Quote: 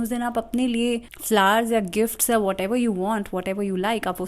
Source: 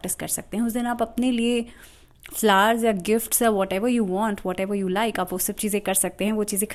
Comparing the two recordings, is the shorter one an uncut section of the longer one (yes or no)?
no